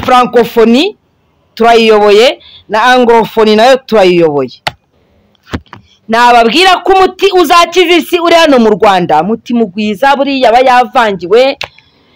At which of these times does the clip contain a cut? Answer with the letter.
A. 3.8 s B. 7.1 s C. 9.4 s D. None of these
D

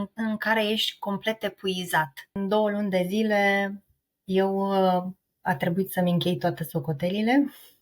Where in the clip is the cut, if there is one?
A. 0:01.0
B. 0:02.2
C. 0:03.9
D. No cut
B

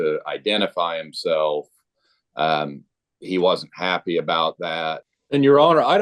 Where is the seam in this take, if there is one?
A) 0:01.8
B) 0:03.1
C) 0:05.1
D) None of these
C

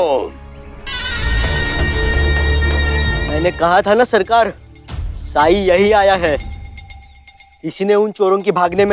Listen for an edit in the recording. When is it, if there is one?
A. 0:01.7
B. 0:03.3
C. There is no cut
B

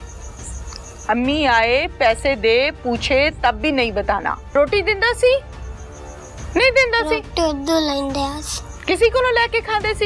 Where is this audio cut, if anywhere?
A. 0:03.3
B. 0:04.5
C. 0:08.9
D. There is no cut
B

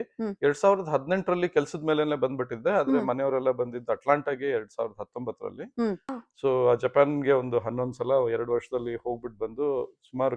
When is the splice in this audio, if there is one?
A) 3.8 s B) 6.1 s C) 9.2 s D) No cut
B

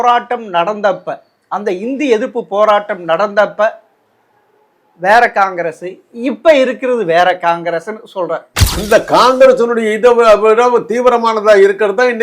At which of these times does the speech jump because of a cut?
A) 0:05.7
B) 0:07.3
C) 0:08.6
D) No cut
C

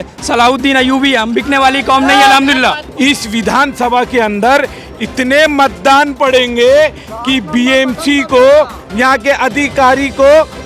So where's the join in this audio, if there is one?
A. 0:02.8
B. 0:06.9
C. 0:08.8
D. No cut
A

